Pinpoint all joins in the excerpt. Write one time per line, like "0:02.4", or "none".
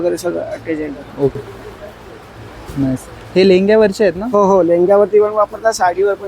0:01.3